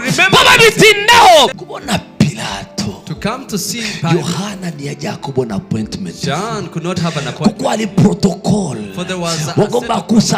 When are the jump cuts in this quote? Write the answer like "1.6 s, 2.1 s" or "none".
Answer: 1.6 s